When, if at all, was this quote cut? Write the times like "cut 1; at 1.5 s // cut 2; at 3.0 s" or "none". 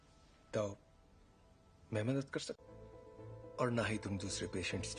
none